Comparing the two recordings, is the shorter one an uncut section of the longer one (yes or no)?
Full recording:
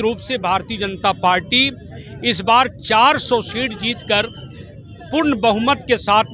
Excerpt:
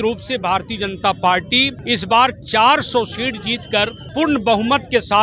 no